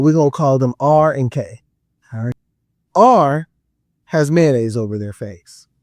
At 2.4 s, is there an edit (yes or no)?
yes